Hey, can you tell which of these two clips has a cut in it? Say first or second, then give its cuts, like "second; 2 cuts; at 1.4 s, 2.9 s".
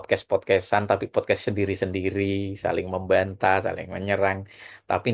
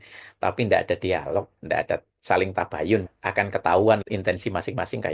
second; 3 cuts; at 1.6 s, 3.2 s, 4.0 s